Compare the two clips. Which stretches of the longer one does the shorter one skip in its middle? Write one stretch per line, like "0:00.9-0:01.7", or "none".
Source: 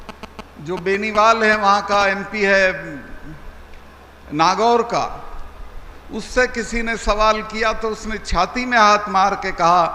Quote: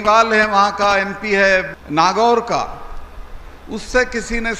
0:02.9-0:04.2